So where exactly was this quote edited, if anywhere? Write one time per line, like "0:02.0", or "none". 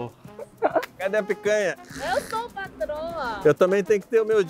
0:00.9
0:01.9
0:03.4